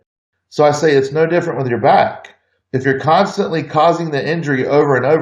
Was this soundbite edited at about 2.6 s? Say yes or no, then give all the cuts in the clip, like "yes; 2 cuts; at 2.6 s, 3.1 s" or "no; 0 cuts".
no; 0 cuts